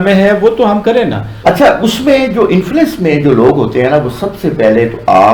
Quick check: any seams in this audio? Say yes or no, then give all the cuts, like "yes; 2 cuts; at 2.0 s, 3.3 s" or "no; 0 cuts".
yes; 1 cut; at 1.3 s